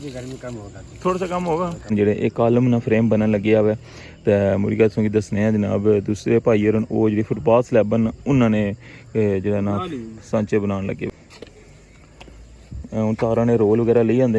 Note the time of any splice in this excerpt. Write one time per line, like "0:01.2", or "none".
0:01.9
0:11.1